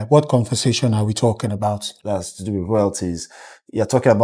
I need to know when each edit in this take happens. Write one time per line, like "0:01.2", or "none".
0:01.9